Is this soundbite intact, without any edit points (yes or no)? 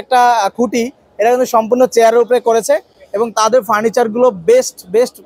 yes